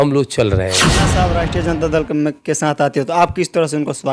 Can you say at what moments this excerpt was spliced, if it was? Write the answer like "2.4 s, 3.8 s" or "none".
1.2 s